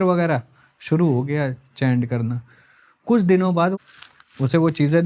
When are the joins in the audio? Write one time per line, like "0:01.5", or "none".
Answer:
0:03.8